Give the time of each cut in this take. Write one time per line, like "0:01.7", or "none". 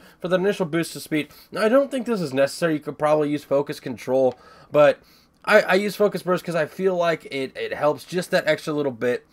0:01.9

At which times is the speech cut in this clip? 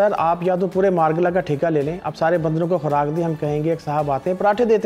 none

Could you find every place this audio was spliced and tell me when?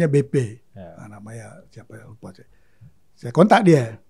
none

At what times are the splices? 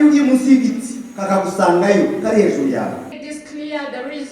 0:03.2

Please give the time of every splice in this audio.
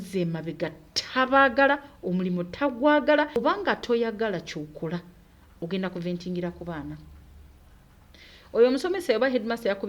0:03.4

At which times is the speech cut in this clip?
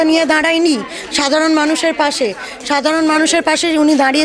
none

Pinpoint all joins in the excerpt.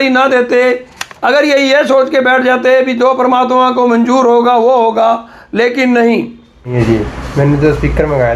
0:06.7

